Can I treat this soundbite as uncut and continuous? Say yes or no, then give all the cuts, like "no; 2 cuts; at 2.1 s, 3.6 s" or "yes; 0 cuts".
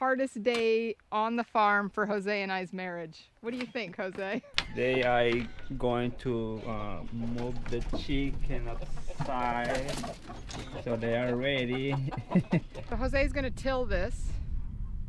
no; 2 cuts; at 4.5 s, 12.8 s